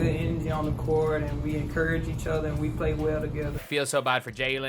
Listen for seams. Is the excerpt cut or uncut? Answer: cut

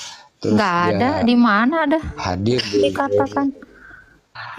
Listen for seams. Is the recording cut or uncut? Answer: uncut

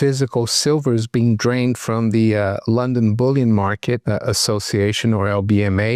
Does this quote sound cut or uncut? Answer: uncut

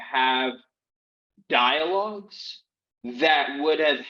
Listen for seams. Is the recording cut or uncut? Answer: uncut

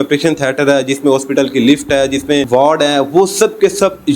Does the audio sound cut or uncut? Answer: cut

